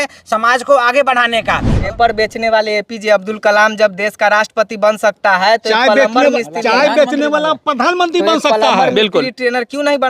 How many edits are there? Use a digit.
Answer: 1